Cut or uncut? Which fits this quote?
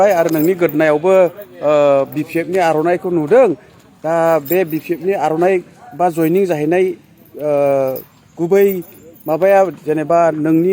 uncut